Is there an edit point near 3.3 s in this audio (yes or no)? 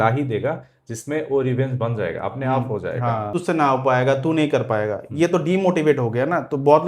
yes